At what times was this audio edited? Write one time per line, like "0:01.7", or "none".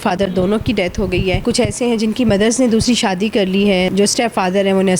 0:01.4
0:03.9